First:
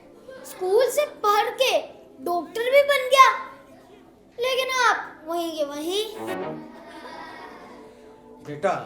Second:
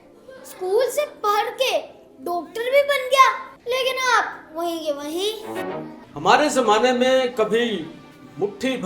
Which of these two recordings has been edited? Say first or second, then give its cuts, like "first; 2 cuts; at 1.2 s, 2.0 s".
second; 2 cuts; at 3.5 s, 6.0 s